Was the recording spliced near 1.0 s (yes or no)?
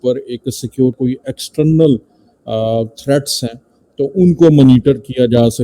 yes